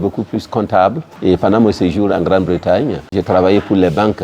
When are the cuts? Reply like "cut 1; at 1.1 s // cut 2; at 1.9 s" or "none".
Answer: cut 1; at 1.1 s // cut 2; at 3.1 s